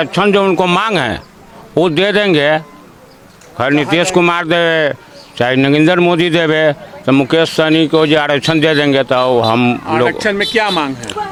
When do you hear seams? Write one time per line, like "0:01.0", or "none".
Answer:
none